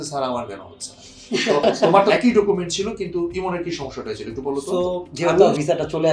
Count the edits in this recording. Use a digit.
2